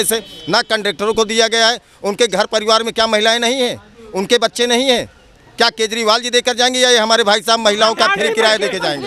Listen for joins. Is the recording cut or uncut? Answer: uncut